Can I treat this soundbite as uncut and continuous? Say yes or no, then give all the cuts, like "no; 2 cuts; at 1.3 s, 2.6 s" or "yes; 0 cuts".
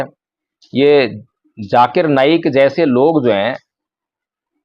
yes; 0 cuts